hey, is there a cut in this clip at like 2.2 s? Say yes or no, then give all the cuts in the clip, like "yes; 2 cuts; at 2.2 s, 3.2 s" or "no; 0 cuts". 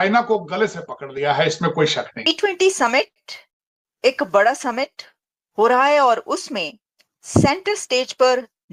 yes; 1 cut; at 2.2 s